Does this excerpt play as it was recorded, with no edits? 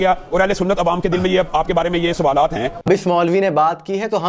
no; 1 cut; at 2.8 s

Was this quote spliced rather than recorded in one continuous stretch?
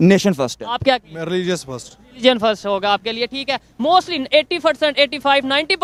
no; 0 cuts

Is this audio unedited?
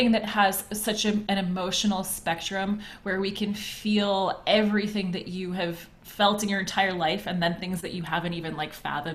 yes; 0 cuts

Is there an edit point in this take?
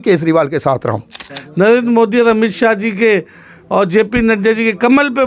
yes; 1 cut; at 1.4 s

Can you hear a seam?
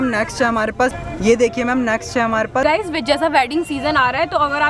yes; 2 cuts; at 0.9 s, 2.6 s

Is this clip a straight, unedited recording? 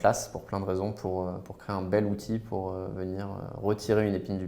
yes; 0 cuts

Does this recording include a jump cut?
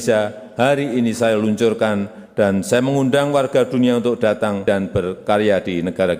yes; 1 cut; at 4.6 s

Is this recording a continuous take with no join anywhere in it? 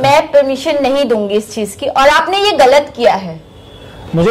yes; 0 cuts

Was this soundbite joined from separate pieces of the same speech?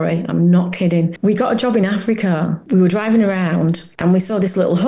yes; 3 cuts; at 1.1 s, 2.6 s, 3.9 s

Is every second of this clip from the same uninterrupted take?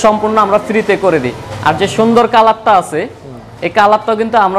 yes; 0 cuts

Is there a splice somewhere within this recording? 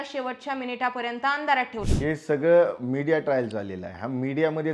yes; 1 cut; at 1.8 s

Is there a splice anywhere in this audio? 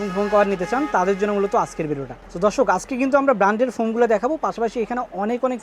no; 0 cuts

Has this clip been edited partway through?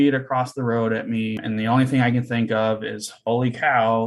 yes; 1 cut; at 1.4 s

